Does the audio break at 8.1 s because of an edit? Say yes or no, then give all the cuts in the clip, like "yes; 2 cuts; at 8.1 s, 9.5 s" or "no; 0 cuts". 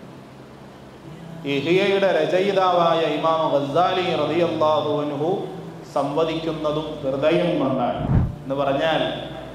yes; 1 cut; at 8.1 s